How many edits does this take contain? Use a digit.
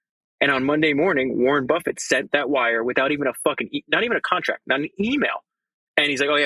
0